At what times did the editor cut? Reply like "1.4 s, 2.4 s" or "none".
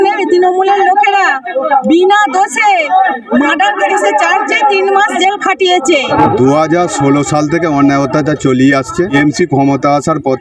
6.1 s, 9.1 s